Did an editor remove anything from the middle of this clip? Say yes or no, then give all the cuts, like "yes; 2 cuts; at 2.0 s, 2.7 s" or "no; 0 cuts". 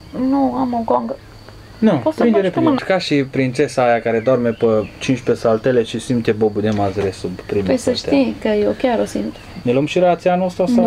yes; 2 cuts; at 2.8 s, 9.6 s